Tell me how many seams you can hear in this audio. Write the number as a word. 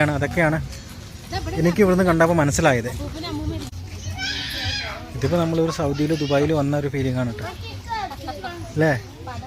one